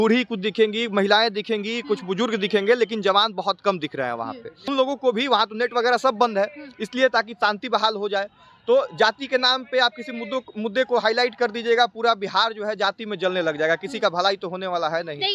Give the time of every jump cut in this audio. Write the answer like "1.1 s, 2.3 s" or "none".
4.6 s